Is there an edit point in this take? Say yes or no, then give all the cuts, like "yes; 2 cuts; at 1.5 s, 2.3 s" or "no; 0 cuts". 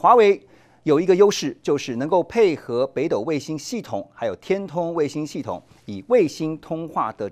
no; 0 cuts